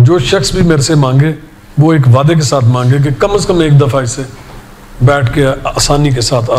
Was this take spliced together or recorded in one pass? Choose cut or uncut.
uncut